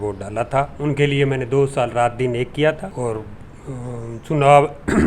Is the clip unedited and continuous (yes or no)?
no